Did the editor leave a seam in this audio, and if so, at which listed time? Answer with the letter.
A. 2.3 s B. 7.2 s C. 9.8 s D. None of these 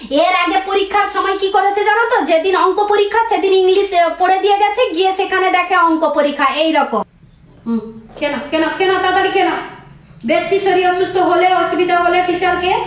B